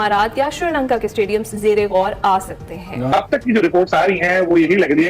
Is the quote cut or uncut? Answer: cut